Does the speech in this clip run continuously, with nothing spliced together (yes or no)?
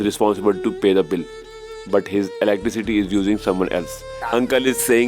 no